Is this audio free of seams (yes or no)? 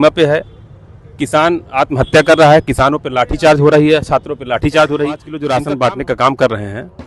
no